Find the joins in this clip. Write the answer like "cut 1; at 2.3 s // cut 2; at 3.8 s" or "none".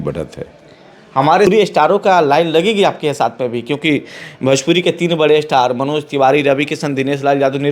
cut 1; at 1.5 s